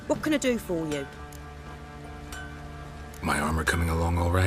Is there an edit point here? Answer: yes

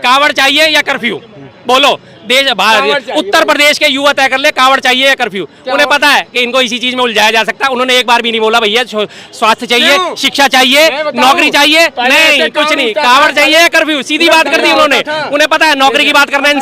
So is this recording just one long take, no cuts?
yes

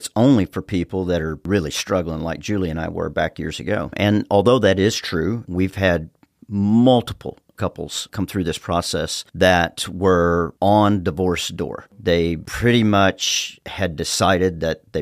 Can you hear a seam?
yes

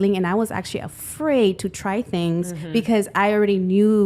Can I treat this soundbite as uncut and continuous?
yes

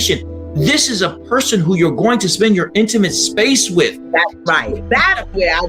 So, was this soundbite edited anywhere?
no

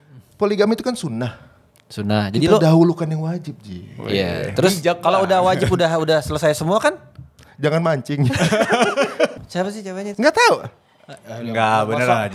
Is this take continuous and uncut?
no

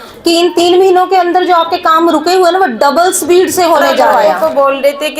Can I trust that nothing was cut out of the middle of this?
no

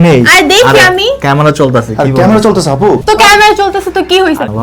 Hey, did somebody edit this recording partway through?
yes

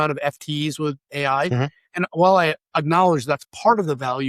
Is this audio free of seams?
yes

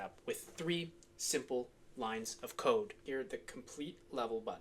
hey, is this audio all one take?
no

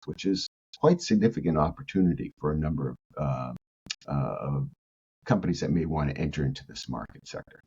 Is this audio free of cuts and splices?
yes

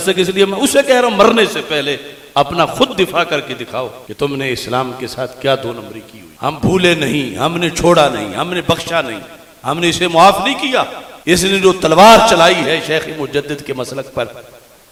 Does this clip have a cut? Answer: no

